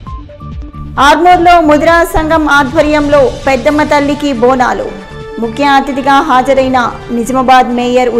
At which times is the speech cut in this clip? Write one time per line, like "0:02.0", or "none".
none